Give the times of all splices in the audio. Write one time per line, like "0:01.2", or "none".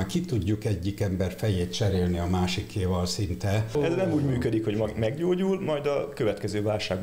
0:03.7